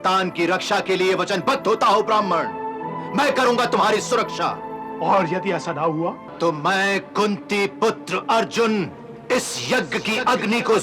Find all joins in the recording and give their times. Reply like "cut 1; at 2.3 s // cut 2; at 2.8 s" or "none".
cut 1; at 6.2 s